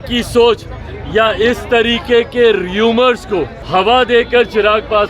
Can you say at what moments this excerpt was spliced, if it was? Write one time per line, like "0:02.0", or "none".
0:03.6

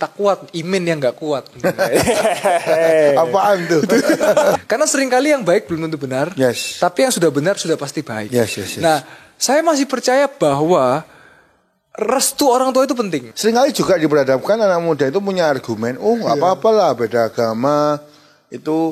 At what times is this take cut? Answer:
0:04.6
0:13.3

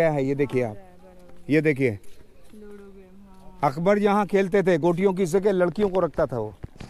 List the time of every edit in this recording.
none

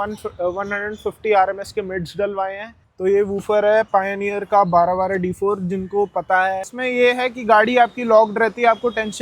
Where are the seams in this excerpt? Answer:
0:02.8
0:06.8

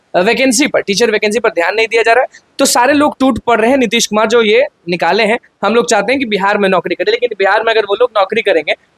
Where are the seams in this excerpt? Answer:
none

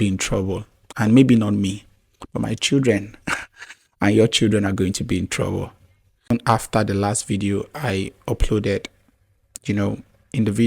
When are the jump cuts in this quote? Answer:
0:06.3

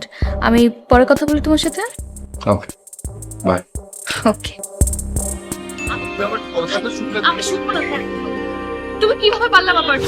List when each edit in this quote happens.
0:05.8

